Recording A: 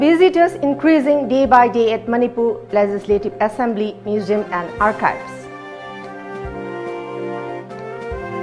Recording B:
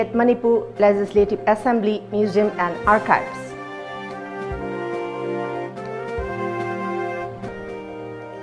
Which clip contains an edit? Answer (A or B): B